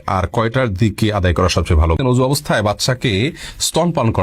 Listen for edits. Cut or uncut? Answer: cut